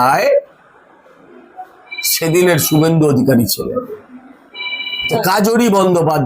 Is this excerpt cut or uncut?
cut